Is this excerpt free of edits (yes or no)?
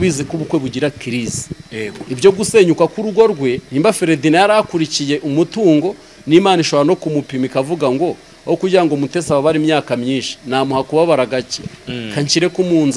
no